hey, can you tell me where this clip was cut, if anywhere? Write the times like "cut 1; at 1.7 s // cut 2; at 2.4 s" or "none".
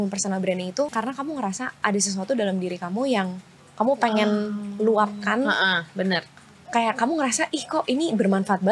cut 1; at 0.9 s